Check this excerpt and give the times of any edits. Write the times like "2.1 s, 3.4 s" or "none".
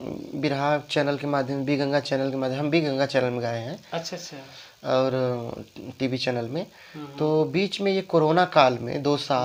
none